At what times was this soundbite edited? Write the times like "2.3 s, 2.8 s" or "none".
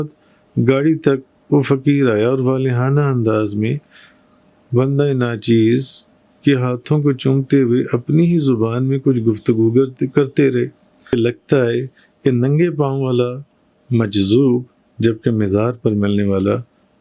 11.1 s